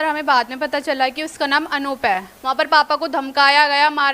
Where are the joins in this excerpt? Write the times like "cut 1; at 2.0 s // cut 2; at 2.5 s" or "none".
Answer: cut 1; at 2.3 s